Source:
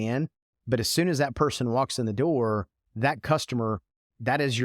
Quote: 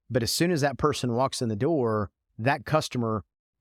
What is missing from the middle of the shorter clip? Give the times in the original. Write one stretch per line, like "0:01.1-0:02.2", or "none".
none